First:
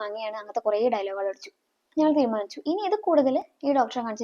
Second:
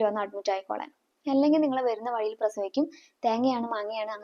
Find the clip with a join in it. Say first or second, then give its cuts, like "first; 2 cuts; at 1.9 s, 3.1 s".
first; 1 cut; at 1.9 s